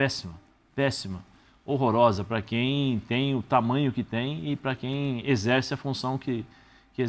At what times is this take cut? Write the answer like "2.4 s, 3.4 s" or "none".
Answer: none

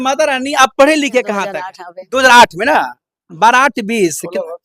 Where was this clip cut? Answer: 1.4 s

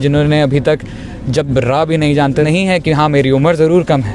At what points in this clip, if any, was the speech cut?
2.4 s

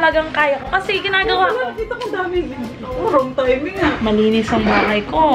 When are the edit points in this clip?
none

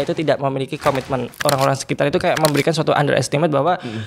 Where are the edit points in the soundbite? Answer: 1.3 s

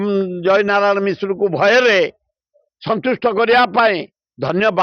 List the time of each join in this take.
none

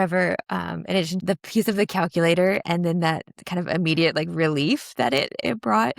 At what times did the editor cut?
1.2 s

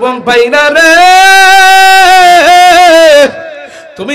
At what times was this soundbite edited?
none

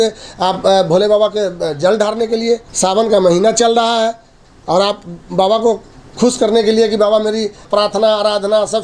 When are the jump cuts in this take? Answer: 2.7 s, 7.6 s

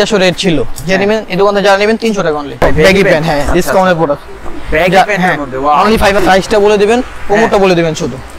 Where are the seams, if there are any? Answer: 2.6 s, 6.2 s

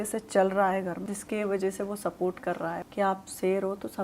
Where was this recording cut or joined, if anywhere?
1.0 s, 2.8 s

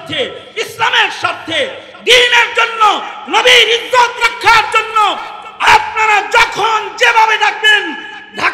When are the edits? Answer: none

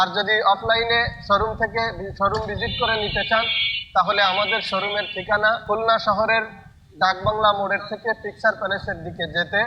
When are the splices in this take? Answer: none

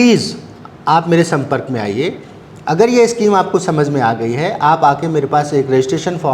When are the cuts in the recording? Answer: 2.1 s

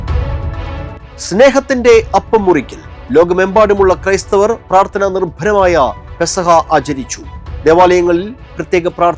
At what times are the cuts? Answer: 1.0 s

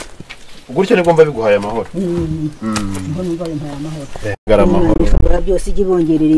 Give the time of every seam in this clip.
4.5 s

